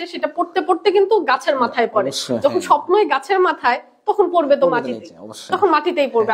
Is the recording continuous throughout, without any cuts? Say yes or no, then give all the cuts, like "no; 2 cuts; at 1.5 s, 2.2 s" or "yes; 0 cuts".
yes; 0 cuts